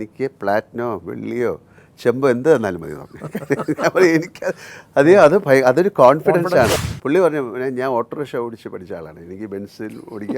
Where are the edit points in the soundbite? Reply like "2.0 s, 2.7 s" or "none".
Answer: 6.8 s